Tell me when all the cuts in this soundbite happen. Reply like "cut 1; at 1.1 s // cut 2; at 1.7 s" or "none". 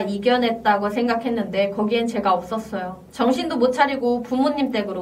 cut 1; at 3.0 s